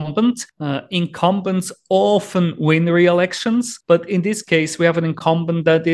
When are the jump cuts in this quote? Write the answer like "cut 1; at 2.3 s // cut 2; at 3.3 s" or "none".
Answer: none